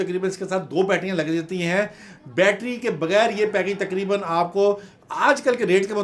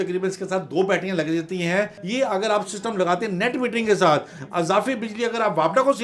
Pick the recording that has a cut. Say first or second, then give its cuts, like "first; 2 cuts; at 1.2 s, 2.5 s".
second; 1 cut; at 2.0 s